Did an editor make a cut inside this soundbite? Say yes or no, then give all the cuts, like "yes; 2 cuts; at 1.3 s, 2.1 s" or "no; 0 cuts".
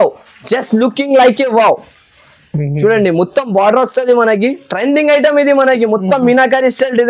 no; 0 cuts